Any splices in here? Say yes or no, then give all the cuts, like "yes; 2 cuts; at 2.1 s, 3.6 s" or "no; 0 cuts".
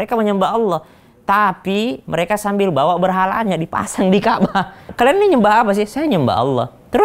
yes; 1 cut; at 4.9 s